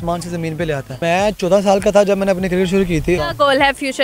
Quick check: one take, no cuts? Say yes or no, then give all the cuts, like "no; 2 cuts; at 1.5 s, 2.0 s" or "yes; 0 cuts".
no; 2 cuts; at 1.0 s, 3.2 s